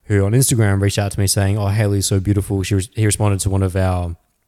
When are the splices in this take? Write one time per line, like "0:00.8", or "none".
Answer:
none